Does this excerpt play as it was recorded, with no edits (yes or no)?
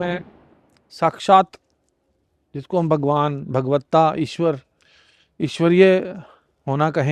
yes